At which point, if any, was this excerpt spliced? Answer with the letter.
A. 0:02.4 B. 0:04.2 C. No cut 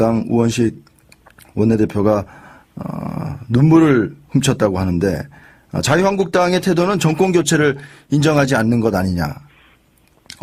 C